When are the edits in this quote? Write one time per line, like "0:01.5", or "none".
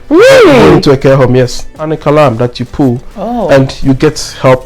0:01.7